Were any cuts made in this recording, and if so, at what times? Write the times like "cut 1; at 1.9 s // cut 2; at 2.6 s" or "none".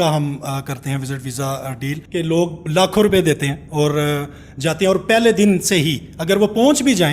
cut 1; at 2.0 s